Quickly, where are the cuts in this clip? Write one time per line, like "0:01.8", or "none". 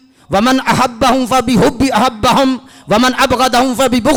none